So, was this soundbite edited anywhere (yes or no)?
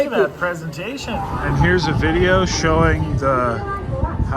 yes